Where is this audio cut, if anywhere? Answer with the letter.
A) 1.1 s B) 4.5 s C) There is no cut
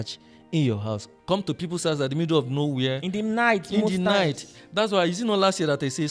A